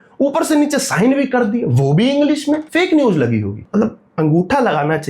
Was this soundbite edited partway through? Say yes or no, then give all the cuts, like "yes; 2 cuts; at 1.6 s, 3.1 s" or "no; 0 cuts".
yes; 2 cuts; at 2.7 s, 3.6 s